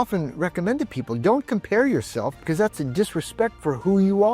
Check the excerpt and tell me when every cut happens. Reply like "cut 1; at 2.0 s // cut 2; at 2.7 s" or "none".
cut 1; at 2.4 s